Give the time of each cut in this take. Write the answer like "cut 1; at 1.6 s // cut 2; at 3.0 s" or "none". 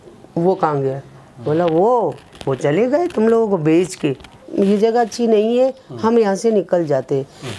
cut 1; at 4.5 s